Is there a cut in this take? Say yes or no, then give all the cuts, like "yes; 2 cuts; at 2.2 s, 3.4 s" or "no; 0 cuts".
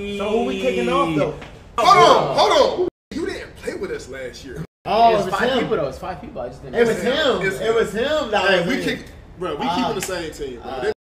yes; 1 cut; at 1.7 s